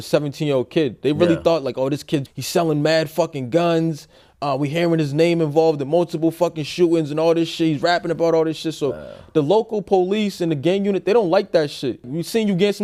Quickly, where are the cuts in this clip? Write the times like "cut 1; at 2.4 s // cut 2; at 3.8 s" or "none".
none